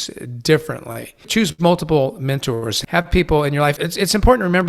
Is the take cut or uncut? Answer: cut